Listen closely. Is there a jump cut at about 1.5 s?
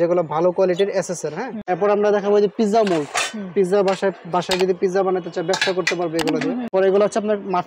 yes; 2 cuts; at 1.5 s, 6.7 s

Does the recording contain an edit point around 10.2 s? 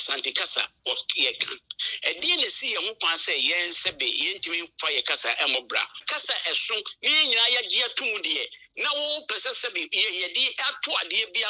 no; 1 cut; at 6.0 s

